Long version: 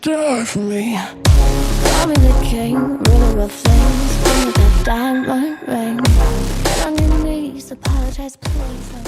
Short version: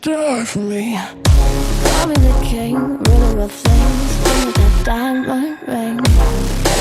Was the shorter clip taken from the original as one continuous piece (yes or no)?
yes